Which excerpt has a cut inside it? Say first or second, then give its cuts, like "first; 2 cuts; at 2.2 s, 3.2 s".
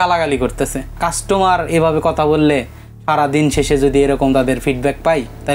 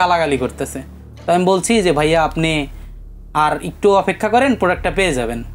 first; 1 cut; at 1.0 s